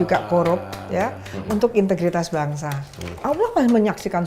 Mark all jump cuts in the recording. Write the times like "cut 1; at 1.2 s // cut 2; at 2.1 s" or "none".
cut 1; at 3.1 s